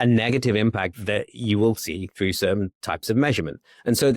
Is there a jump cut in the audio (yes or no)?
yes